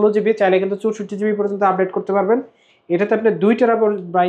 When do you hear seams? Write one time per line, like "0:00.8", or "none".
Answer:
none